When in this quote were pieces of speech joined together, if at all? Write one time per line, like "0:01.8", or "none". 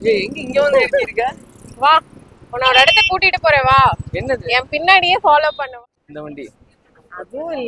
0:05.6